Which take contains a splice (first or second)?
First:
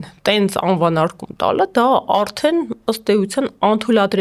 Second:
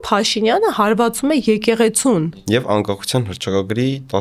second